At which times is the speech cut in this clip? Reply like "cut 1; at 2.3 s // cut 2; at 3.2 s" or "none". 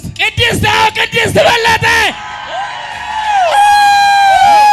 none